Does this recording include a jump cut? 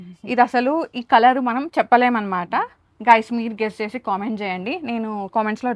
no; 0 cuts

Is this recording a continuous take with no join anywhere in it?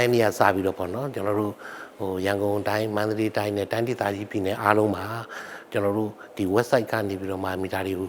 yes; 0 cuts

